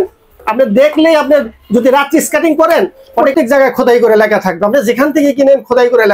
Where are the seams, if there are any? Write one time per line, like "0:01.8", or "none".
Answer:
0:03.3